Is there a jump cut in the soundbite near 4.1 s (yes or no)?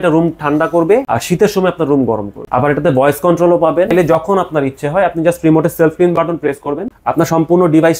yes